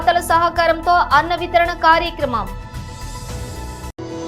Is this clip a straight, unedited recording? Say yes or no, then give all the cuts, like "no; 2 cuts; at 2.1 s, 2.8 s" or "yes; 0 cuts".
no; 1 cut; at 2.5 s